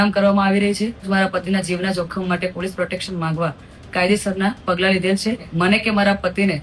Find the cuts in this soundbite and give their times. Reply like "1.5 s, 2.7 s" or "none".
1.1 s, 5.5 s